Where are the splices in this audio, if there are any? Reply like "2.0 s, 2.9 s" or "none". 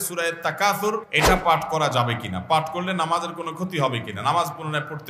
1.1 s